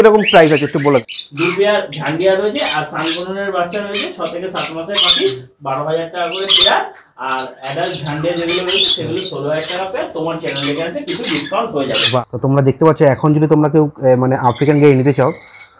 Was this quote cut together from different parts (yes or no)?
yes